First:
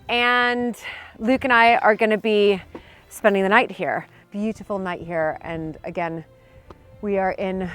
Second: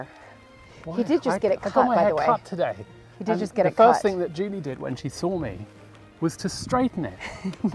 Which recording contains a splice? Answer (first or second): first